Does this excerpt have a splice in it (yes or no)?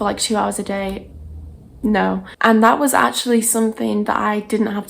yes